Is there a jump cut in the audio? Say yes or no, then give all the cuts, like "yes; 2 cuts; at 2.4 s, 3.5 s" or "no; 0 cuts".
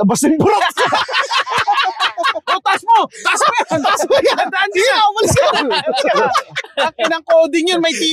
no; 0 cuts